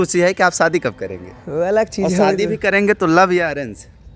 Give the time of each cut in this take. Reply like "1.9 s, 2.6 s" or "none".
none